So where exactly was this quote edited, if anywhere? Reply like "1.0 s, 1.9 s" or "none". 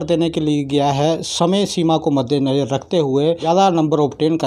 3.4 s

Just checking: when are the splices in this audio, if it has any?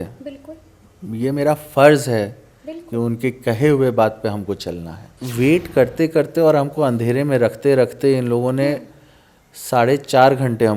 5.2 s

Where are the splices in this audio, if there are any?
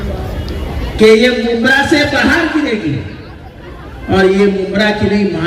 none

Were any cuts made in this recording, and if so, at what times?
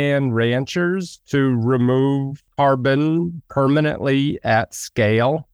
2.4 s, 3.4 s

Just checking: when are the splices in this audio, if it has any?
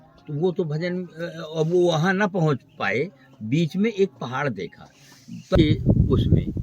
5.6 s

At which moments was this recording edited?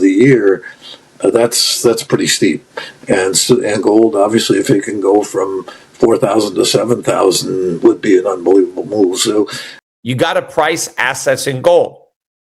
9.7 s

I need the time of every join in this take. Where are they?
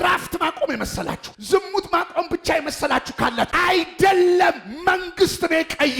3.5 s

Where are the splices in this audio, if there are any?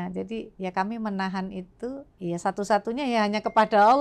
2.1 s

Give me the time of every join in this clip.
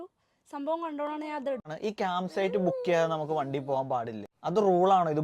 1.7 s, 4.3 s

